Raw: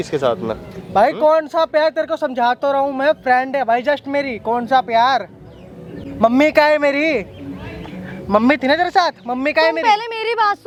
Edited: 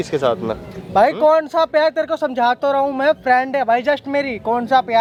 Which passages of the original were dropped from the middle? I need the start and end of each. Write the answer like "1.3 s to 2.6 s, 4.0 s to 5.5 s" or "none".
none